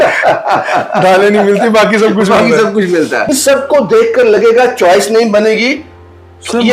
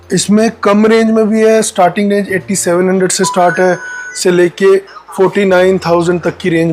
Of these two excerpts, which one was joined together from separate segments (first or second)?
first